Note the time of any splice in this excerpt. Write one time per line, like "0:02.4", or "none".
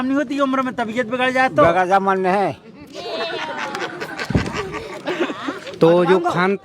0:05.5